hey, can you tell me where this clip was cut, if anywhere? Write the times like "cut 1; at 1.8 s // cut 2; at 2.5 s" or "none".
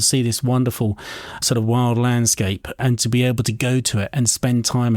cut 1; at 1.4 s // cut 2; at 2.8 s

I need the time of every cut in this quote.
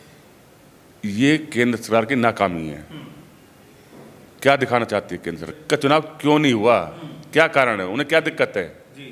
cut 1; at 5.5 s

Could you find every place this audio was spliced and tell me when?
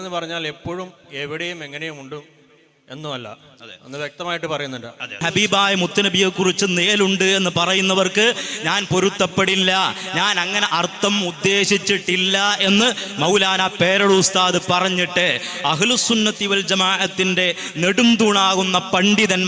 cut 1; at 5.2 s

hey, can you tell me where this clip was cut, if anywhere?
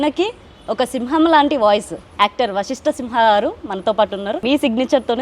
cut 1; at 2.0 s // cut 2; at 4.4 s

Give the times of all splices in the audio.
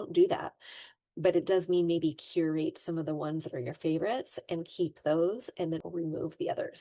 cut 1; at 5.8 s

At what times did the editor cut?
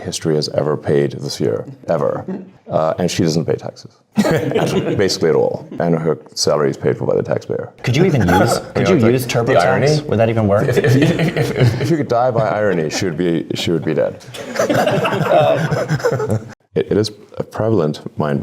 cut 1; at 1.7 s // cut 2; at 16.5 s

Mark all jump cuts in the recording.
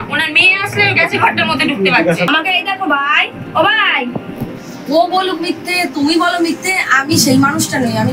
cut 1; at 2.3 s

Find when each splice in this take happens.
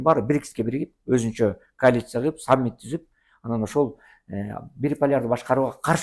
none

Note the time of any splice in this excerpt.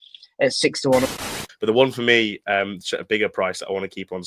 cut 1; at 1.1 s

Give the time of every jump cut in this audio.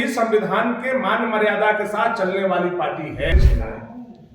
cut 1; at 3.3 s

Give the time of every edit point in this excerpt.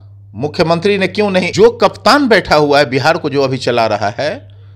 cut 1; at 1.5 s

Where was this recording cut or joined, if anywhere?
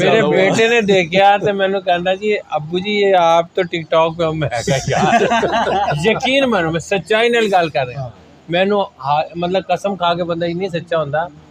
none

